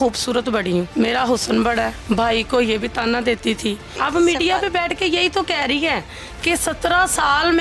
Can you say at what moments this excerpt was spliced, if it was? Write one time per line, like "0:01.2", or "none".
0:00.9
0:02.0
0:03.9